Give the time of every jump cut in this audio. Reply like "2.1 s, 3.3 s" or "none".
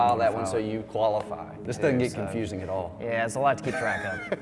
1.6 s